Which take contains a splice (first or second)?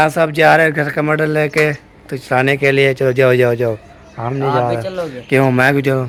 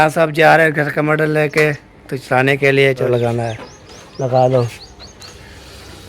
second